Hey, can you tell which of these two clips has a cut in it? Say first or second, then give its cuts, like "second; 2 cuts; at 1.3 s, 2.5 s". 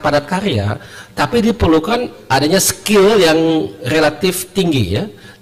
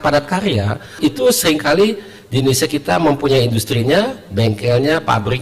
second; 1 cut; at 1.0 s